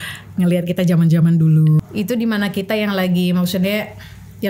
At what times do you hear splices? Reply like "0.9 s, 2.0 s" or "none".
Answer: 1.8 s